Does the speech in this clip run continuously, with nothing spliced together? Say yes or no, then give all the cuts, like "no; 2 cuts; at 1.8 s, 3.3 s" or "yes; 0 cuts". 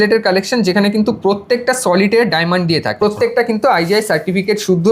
no; 1 cut; at 3.0 s